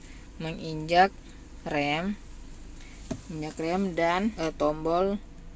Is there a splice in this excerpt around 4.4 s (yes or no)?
yes